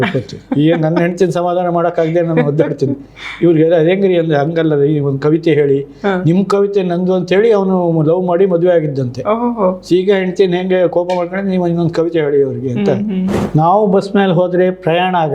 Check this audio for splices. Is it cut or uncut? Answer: cut